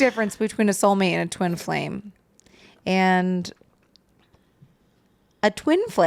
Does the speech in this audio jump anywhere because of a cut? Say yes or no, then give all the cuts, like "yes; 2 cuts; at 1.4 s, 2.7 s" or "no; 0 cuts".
no; 0 cuts